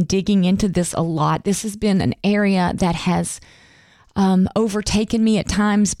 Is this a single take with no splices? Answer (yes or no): yes